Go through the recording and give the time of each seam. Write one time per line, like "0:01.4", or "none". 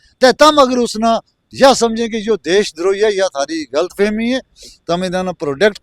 none